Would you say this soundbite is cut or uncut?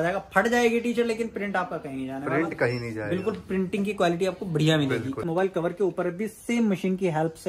cut